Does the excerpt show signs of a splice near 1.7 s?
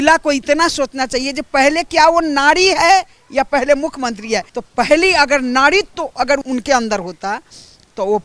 no; 2 cuts; at 4.6 s, 6.4 s

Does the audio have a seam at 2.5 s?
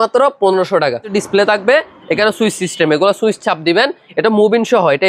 no; 1 cut; at 1.1 s

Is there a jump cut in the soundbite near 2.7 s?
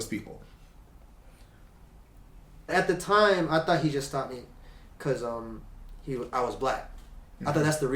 yes; 1 cut; at 2.7 s

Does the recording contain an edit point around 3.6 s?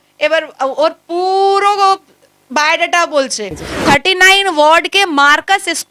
yes; 1 cut; at 3.6 s

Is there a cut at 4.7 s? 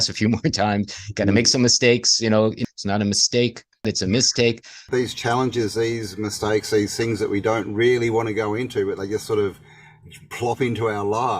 yes; 3 cuts; at 2.6 s, 3.8 s, 4.7 s

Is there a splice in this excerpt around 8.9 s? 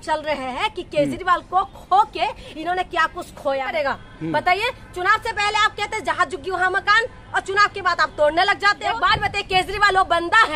yes; 2 cuts; at 3.7 s, 8.9 s

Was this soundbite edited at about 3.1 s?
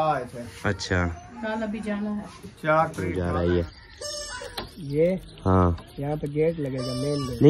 yes; 1 cut; at 3.1 s

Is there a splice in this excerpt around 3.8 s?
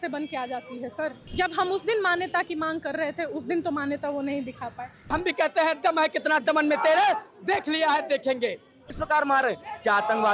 no; 3 cuts; at 1.2 s, 5.1 s, 8.9 s

